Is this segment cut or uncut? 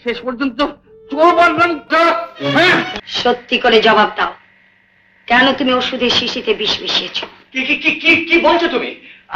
cut